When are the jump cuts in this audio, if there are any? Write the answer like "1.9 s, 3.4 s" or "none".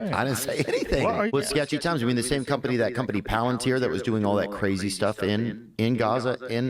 1.3 s